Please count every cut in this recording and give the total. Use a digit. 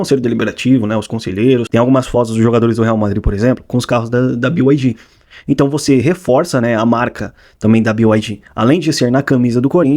1